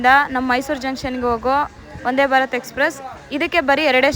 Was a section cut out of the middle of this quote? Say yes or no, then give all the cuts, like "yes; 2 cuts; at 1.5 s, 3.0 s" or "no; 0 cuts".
no; 0 cuts